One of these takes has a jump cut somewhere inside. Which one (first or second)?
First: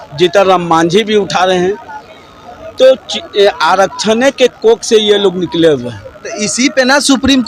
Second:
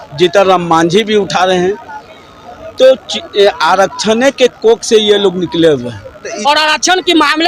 second